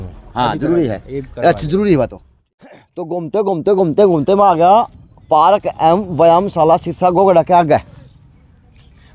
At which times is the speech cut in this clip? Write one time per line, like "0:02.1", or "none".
0:02.6